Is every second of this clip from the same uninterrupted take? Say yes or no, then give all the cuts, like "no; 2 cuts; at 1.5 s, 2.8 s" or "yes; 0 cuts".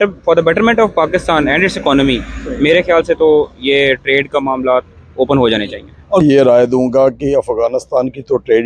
no; 1 cut; at 6.2 s